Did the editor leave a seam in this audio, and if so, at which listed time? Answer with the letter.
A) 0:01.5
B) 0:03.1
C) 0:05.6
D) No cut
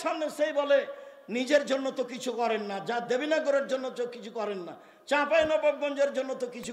D